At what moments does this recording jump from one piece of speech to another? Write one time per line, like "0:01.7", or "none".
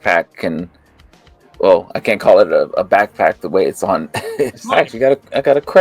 0:04.6

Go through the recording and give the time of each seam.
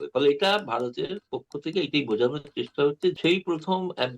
0:03.1

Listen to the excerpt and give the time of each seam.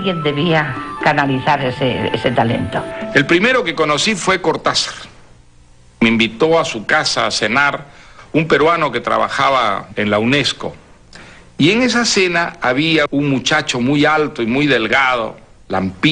none

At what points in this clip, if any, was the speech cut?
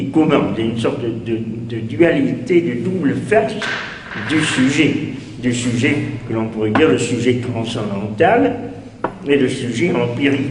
0:02.9

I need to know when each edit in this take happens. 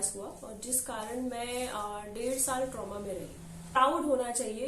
0:03.8

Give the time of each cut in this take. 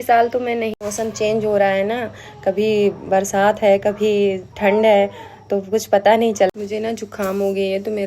0:00.8
0:06.5

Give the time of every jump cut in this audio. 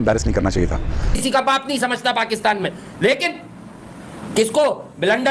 0:01.1

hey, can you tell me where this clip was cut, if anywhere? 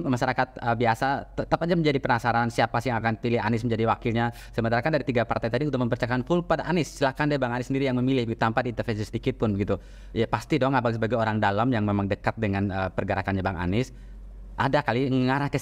none

